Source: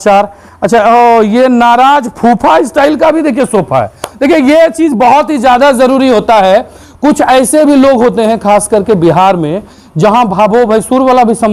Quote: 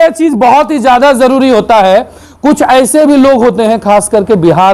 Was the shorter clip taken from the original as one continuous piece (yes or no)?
yes